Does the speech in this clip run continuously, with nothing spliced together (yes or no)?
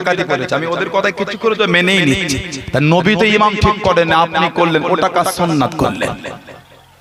yes